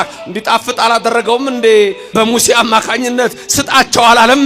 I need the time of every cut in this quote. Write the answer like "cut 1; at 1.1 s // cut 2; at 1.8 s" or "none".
cut 1; at 2.1 s

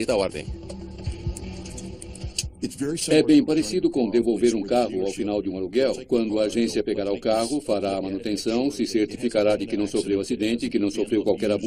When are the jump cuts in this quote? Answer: none

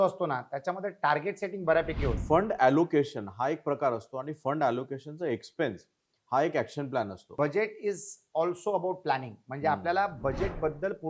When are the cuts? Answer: cut 1; at 2.2 s // cut 2; at 7.3 s

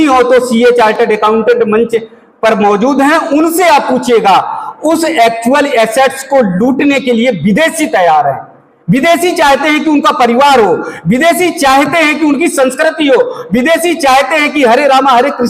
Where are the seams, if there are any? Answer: none

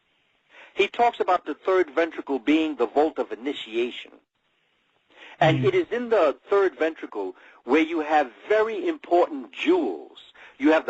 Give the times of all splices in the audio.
cut 1; at 1.3 s

